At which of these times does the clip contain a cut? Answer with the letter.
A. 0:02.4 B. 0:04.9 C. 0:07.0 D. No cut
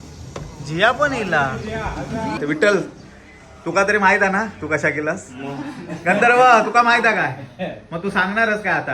A